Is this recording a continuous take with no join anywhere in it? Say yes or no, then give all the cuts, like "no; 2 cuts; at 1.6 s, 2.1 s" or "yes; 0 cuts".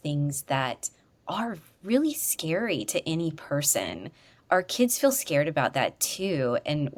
yes; 0 cuts